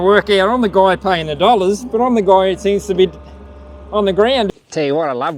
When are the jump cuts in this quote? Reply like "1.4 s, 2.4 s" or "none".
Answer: 4.5 s